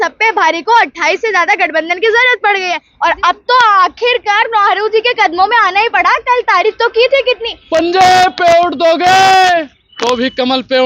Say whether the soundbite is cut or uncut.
cut